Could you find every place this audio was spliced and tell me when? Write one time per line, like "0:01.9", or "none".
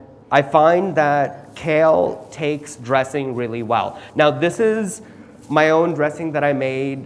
none

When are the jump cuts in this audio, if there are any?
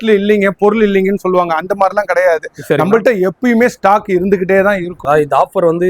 0:05.0

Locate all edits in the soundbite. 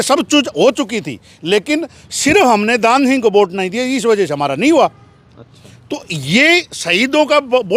none

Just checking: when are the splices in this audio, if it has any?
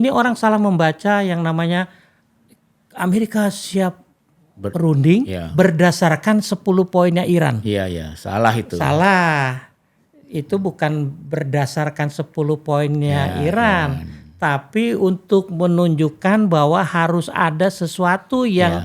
none

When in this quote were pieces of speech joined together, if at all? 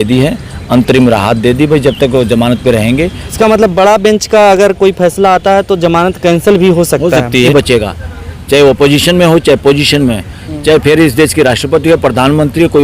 0:03.3
0:07.5

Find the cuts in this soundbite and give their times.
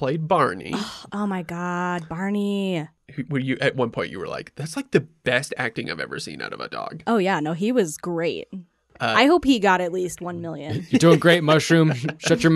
0:03.0
0:07.0

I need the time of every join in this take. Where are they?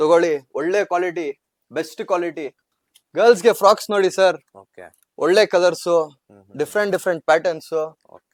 0:02.6

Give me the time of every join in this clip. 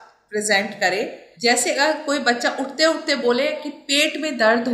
0:01.2

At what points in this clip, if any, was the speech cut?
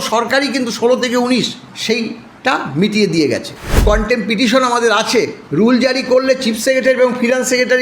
0:01.7
0:03.8
0:05.4

